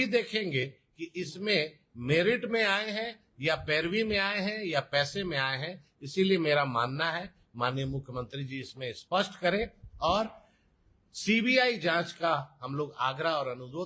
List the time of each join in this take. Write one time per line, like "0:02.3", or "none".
none